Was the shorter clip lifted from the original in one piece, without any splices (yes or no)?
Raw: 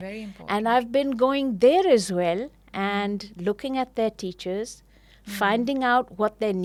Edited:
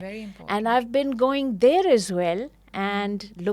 yes